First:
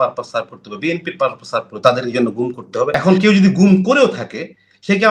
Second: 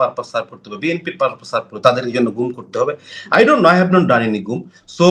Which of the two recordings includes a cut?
first; 1 cut; at 2.9 s

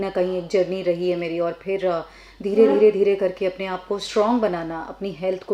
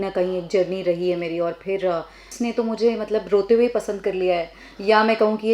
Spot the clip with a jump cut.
second; 1 cut; at 2.3 s

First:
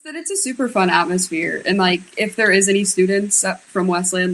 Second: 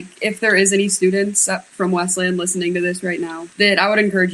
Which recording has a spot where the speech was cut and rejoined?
second; 1 cut; at 3.4 s

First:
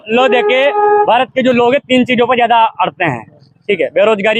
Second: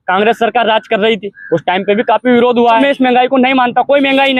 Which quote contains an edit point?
second; 1 cut; at 2.8 s

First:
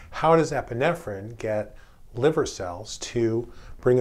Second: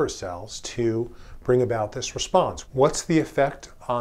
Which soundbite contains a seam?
second; 1 cut; at 2.6 s

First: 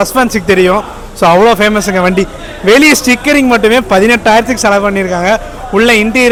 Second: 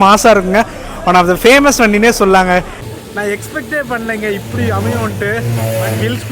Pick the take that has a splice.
second; 1 cut; at 2.8 s

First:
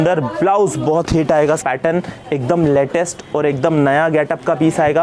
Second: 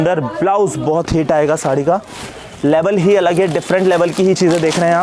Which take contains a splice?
first; 1 cut; at 1.6 s

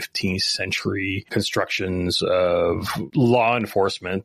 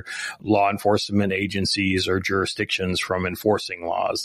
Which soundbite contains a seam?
first; 2 cuts; at 1.2 s, 3.0 s

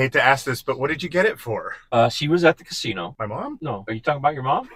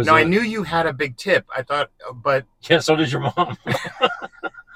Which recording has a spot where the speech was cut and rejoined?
first; 2 cuts; at 1.7 s, 3.3 s

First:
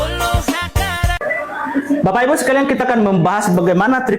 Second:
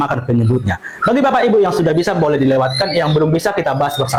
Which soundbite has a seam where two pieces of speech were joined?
first; 1 cut; at 1.2 s

